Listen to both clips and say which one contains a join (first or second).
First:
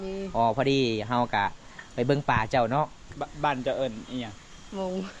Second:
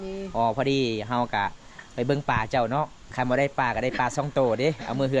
first